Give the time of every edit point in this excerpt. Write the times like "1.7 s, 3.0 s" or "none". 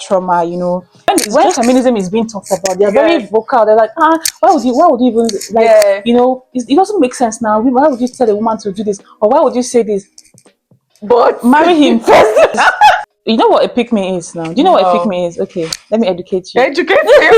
1.1 s, 13.0 s